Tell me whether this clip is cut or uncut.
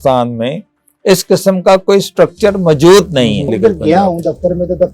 cut